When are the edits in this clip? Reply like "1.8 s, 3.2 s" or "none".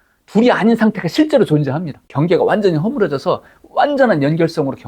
2.0 s